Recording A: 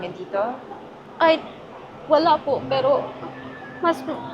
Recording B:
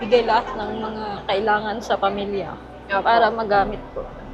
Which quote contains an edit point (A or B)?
A